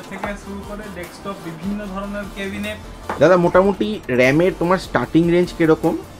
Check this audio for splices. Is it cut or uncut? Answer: cut